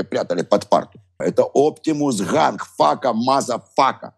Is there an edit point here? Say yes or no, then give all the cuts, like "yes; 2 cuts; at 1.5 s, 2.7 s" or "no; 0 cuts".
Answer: yes; 1 cut; at 1.2 s